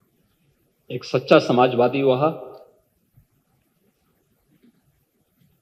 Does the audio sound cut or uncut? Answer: uncut